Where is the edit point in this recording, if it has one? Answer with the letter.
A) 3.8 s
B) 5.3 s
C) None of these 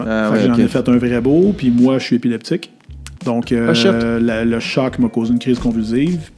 C